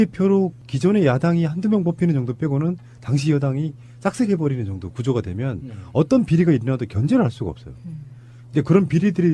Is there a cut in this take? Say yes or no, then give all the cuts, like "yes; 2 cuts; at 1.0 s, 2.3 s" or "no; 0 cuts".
yes; 1 cut; at 7.4 s